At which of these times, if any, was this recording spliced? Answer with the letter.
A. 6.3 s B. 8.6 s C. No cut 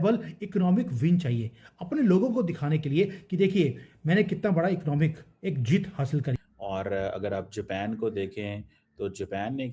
A